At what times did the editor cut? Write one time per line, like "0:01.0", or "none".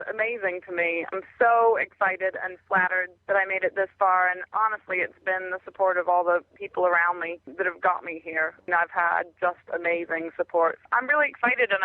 0:01.1
0:03.1
0:06.5
0:07.4
0:08.6
0:10.8